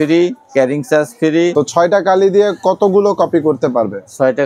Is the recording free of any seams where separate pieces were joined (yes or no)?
no